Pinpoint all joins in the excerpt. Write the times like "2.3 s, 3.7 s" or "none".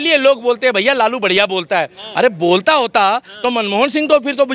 none